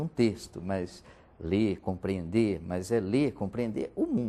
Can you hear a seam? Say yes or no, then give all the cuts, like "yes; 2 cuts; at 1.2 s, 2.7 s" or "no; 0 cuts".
no; 0 cuts